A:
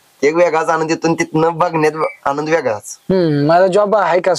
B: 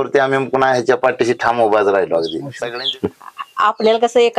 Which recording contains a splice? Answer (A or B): B